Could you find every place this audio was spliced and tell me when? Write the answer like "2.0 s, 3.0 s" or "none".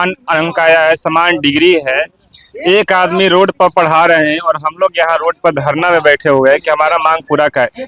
none